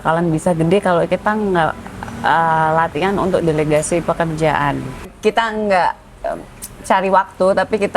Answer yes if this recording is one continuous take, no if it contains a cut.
no